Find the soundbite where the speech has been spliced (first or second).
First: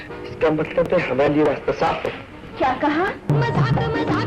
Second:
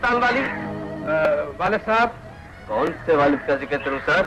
first